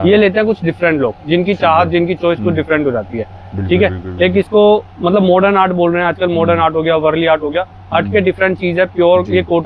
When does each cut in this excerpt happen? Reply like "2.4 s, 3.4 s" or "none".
none